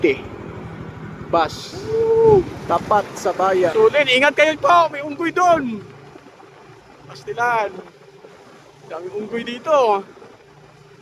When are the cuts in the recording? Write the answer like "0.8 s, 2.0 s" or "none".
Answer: 1.7 s, 2.6 s, 3.7 s